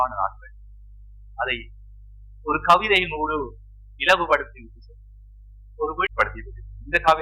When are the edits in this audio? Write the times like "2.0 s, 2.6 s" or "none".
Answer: 6.1 s